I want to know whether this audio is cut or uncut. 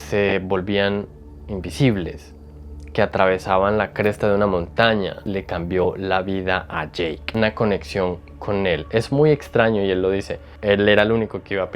cut